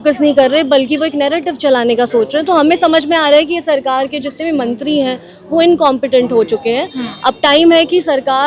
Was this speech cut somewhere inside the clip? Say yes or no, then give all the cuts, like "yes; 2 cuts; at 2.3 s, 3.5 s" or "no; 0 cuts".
no; 0 cuts